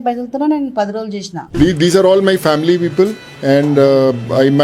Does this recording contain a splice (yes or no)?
yes